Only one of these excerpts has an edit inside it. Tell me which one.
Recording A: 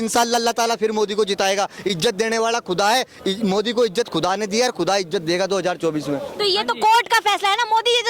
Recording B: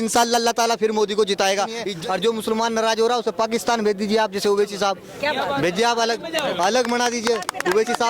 B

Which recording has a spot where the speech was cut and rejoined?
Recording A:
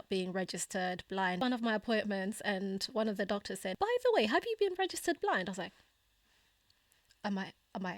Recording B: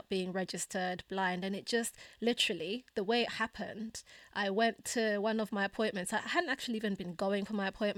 A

